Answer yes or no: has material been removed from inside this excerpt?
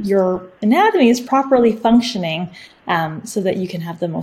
yes